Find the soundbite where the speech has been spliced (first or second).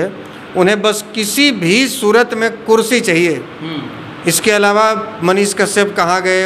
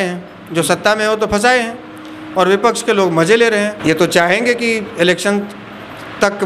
second